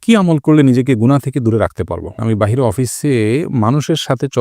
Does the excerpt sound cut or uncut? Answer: cut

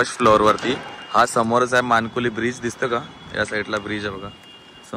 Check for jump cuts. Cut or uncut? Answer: uncut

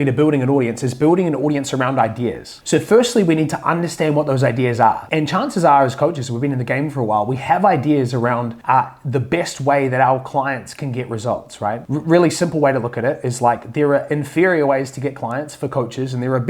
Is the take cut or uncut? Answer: uncut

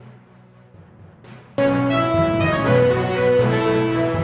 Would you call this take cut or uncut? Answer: uncut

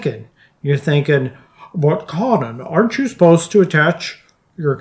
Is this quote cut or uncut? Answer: uncut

